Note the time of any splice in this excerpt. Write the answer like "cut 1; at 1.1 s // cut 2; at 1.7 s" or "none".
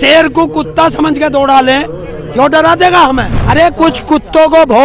cut 1; at 3.3 s